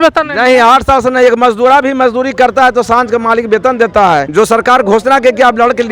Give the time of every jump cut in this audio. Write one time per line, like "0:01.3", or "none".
0:04.3